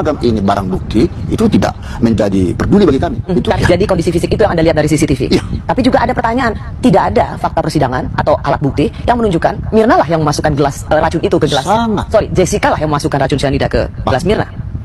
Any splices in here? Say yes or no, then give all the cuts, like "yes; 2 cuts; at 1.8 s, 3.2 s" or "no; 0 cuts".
yes; 1 cut; at 3.6 s